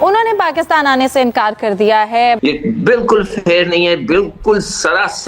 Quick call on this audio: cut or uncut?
cut